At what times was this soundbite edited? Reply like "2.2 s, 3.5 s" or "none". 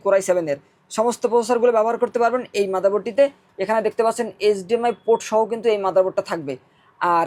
none